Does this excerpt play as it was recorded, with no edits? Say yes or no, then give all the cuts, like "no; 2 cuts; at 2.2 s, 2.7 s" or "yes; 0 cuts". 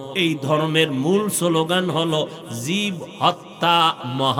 yes; 0 cuts